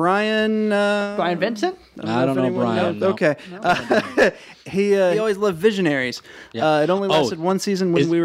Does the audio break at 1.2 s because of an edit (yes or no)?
no